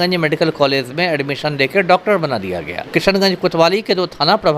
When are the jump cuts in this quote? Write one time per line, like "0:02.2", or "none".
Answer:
0:02.9